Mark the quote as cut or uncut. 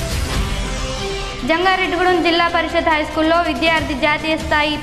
cut